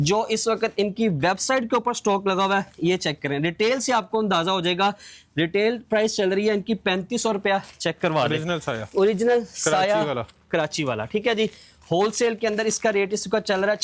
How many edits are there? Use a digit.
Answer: 0